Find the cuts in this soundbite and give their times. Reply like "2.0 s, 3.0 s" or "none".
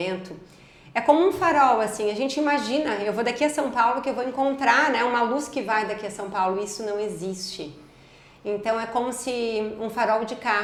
none